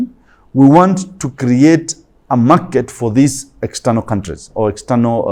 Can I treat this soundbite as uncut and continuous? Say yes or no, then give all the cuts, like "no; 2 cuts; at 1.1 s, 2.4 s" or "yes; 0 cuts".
yes; 0 cuts